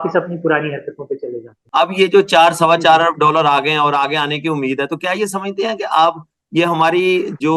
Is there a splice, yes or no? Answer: yes